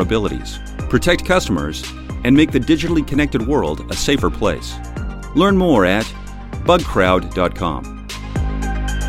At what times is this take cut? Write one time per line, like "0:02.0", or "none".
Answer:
0:08.0